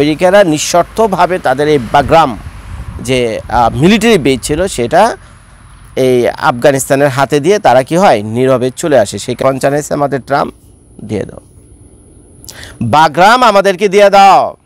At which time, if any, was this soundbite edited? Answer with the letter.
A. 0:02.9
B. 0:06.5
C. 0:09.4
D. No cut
C